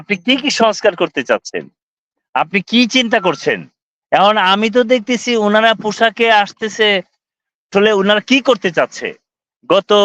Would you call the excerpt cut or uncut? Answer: uncut